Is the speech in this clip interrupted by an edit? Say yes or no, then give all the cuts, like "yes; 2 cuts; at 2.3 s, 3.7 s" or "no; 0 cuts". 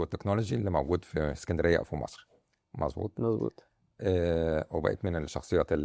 no; 0 cuts